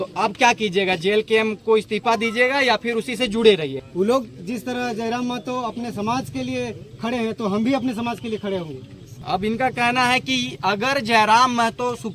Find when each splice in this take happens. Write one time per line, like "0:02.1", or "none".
0:03.8
0:09.2